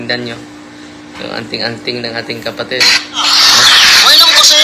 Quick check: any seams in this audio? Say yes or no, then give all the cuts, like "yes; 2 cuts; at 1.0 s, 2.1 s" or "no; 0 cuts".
yes; 1 cut; at 3.2 s